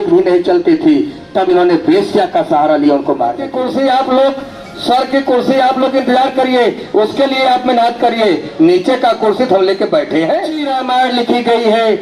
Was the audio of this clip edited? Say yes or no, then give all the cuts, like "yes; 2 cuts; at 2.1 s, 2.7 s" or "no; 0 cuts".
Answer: yes; 2 cuts; at 3.6 s, 10.7 s